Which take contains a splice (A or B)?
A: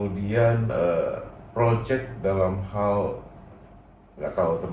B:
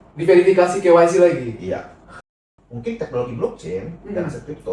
B